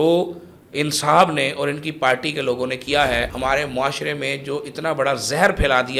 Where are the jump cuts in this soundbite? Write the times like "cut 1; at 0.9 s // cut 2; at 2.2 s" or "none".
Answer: cut 1; at 3.3 s

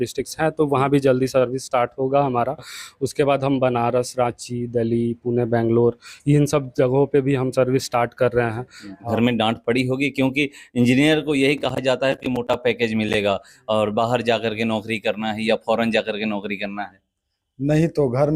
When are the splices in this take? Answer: cut 1; at 9.0 s

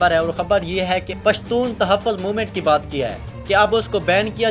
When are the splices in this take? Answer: cut 1; at 1.1 s

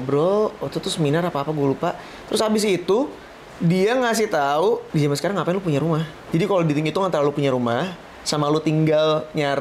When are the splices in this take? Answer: cut 1; at 4.9 s // cut 2; at 6.2 s

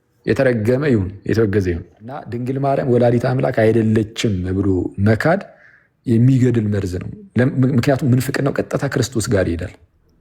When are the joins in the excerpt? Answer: cut 1; at 2.4 s

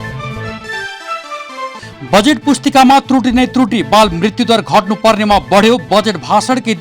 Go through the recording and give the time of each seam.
cut 1; at 1.7 s

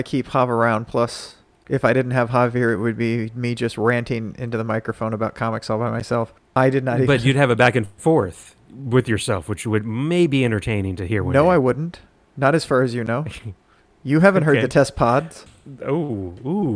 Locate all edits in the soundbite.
none

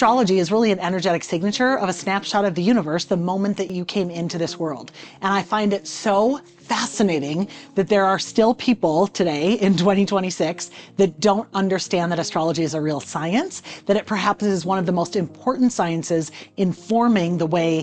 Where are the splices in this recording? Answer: cut 1; at 3.7 s

